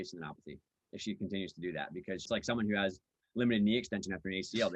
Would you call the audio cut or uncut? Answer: cut